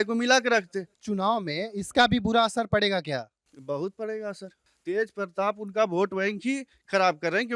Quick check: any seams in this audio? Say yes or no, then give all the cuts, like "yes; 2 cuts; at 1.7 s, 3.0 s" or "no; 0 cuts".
yes; 1 cut; at 1.0 s